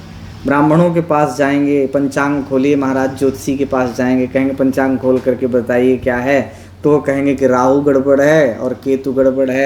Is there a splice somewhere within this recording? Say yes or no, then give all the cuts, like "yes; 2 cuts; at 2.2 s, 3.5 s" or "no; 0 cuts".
no; 0 cuts